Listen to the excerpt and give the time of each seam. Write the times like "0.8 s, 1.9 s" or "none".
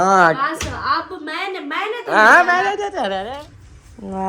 3.2 s